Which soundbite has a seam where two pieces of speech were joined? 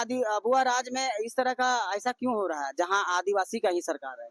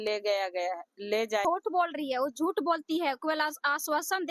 second; 1 cut; at 1.4 s

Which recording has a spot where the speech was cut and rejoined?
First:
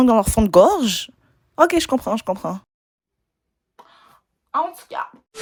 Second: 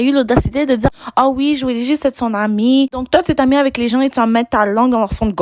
second; 2 cuts; at 0.9 s, 3.0 s

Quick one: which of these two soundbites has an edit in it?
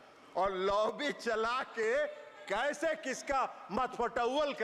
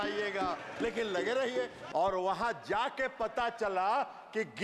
second; 1 cut; at 1.8 s

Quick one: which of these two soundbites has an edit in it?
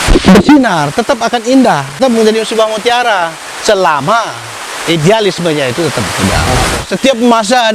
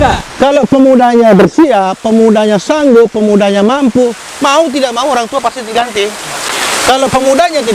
first; 2 cuts; at 2.0 s, 6.8 s

